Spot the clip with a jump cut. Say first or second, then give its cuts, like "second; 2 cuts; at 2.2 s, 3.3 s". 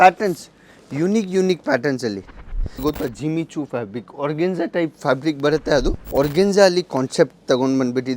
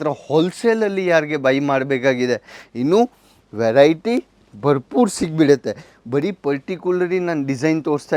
first; 2 cuts; at 2.8 s, 6.0 s